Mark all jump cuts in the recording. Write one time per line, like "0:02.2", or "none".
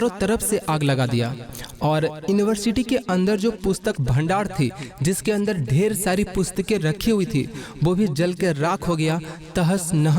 none